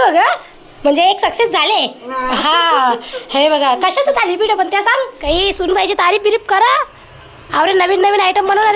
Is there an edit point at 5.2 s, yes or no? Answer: yes